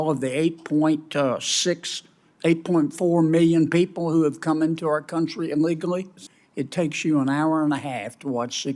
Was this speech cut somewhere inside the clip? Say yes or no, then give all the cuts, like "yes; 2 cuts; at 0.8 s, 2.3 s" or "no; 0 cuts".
yes; 1 cut; at 6.1 s